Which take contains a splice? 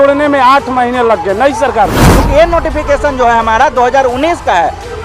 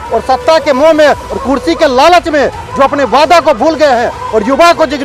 first; 1 cut; at 2.1 s

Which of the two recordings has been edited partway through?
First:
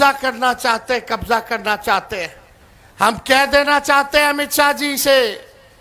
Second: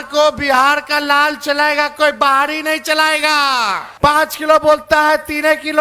second; 1 cut; at 3.8 s

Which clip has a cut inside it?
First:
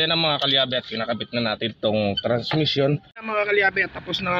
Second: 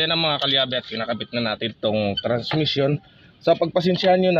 first; 1 cut; at 3.1 s

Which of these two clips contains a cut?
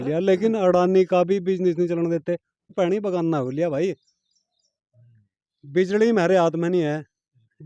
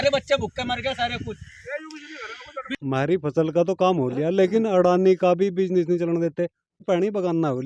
second; 1 cut; at 2.8 s

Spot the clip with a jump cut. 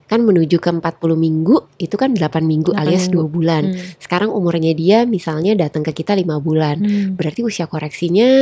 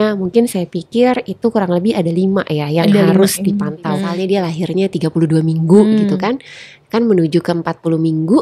second; 1 cut; at 4.1 s

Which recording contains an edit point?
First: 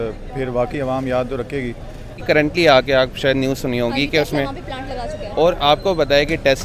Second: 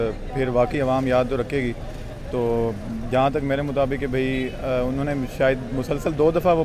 first; 1 cut; at 2.2 s

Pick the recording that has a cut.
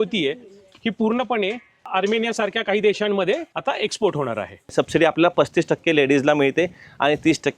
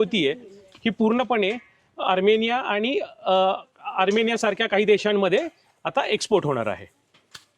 first; 3 cuts; at 1.7 s, 3.5 s, 4.7 s

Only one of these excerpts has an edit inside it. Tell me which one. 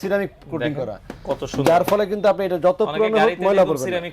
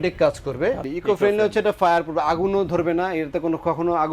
second; 1 cut; at 0.9 s

